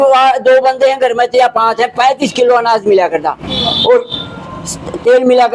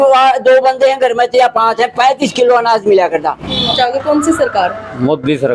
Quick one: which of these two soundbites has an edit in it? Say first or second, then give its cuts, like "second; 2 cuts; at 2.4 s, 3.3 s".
second; 1 cut; at 3.7 s